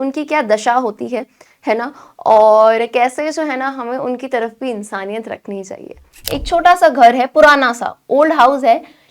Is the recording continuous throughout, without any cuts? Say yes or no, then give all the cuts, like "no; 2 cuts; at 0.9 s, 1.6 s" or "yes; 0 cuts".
no; 1 cut; at 6.2 s